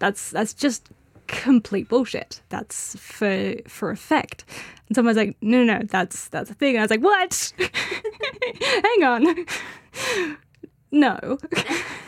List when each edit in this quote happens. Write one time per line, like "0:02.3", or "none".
0:02.4

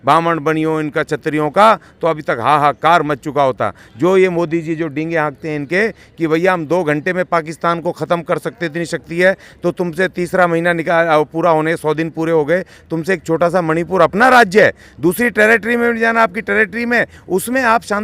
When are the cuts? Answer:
none

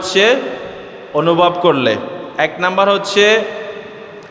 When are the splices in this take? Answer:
none

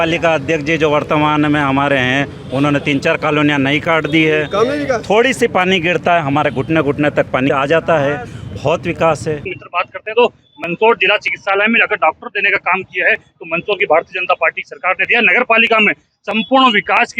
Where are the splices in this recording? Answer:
0:07.5
0:09.6

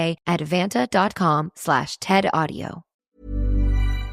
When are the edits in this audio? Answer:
0:02.9

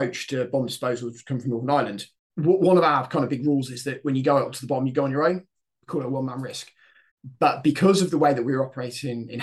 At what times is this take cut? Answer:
0:02.2

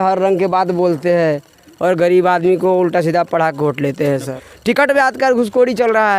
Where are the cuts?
0:04.4

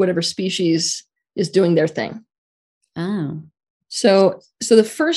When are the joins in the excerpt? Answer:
none

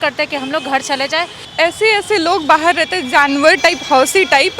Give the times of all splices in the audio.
0:01.4

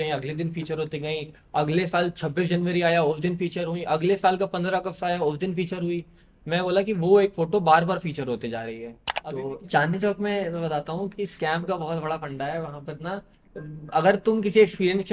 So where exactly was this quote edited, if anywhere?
0:09.0

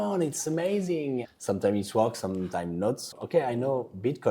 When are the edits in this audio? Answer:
0:03.1

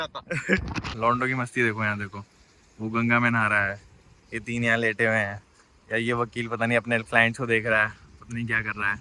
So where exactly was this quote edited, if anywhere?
0:00.9

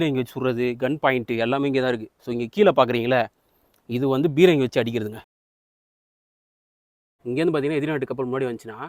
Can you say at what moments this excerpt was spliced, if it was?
none

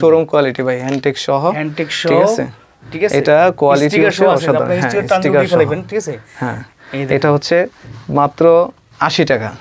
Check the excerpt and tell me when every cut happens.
none

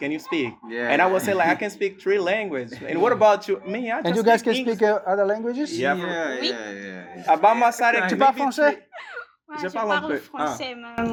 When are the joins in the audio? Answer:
none

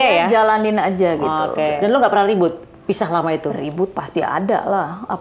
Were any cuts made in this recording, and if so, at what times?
0:01.8

